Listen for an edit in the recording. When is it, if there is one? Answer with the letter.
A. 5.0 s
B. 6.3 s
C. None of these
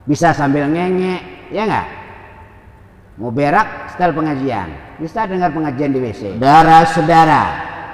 B